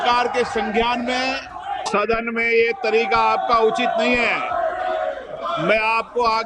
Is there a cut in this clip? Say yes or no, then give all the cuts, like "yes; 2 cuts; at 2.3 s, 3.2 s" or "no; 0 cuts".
yes; 1 cut; at 1.8 s